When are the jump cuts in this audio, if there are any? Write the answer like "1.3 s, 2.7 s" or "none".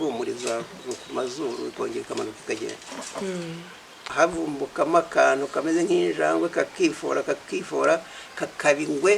4.1 s